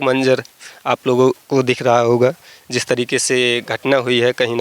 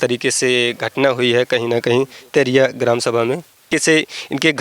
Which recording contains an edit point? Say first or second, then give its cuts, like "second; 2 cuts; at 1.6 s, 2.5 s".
second; 1 cut; at 3.7 s